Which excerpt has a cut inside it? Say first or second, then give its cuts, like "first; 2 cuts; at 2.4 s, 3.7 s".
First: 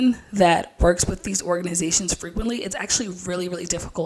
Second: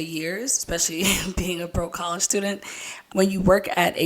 second; 1 cut; at 2.8 s